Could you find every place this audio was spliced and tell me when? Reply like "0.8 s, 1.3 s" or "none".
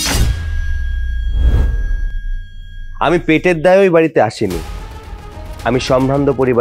none